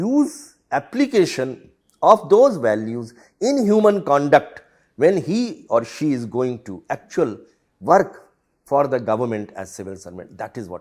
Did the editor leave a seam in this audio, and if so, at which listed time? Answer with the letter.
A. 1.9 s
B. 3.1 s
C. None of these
C